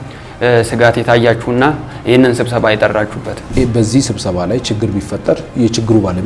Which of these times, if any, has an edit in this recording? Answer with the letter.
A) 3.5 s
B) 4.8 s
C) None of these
A